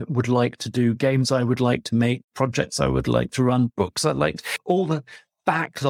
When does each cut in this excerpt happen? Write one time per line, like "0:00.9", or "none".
none

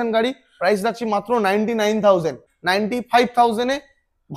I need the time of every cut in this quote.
0:02.5

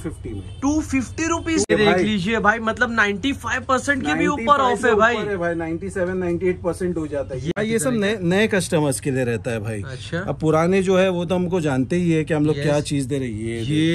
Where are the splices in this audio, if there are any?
0:01.7
0:07.5

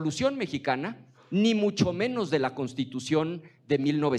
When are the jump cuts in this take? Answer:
none

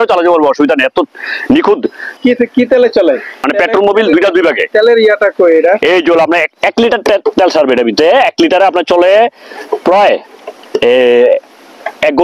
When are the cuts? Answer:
0:02.2
0:03.5

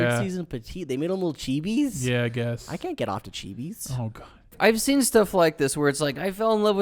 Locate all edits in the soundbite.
0:04.5

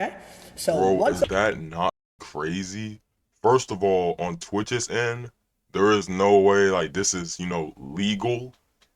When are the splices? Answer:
0:02.0

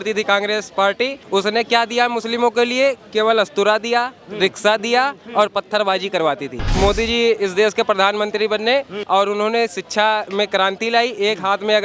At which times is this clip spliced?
0:01.2
0:06.7
0:08.9

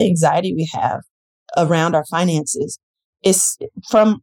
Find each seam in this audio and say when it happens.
none

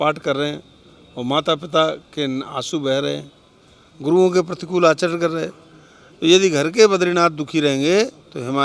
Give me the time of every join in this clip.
none

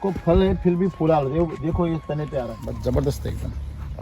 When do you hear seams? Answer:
0:02.7

